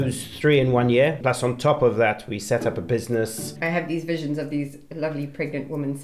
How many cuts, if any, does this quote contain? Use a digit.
2